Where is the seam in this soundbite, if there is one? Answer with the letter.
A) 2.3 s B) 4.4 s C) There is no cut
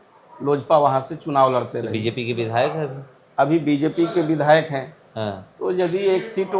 C